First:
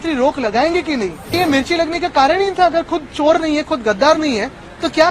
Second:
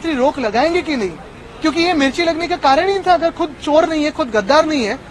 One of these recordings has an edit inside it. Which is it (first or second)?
first